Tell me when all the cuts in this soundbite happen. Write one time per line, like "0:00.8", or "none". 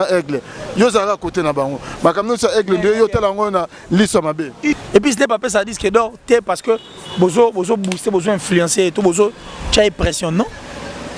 0:04.8